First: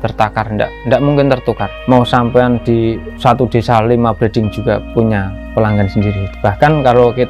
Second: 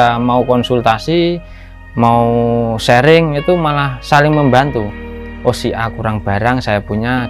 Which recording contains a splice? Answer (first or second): first